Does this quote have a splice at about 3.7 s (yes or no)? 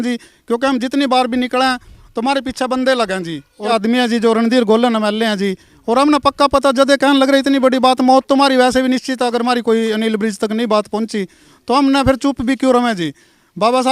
yes